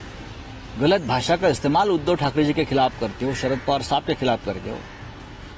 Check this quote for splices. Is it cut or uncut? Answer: uncut